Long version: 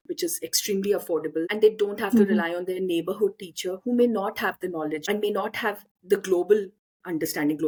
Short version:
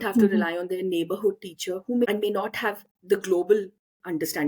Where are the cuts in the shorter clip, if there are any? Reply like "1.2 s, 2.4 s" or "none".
2.0 s